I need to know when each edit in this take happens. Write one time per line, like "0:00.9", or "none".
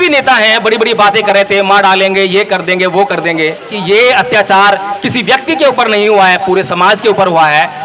0:03.8